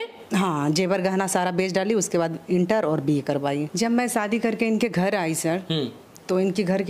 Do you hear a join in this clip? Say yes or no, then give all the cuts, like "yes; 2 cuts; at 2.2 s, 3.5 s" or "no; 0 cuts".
yes; 1 cut; at 3.7 s